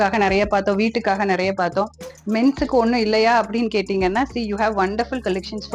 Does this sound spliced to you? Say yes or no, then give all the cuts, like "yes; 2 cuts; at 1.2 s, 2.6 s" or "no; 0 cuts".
no; 0 cuts